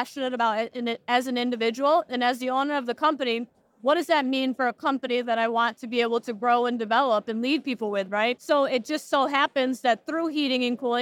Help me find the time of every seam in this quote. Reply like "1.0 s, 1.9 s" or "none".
8.4 s